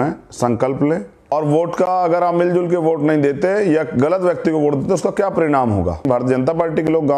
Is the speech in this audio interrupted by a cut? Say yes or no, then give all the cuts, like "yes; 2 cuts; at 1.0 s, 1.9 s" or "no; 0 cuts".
yes; 2 cuts; at 1.3 s, 6.1 s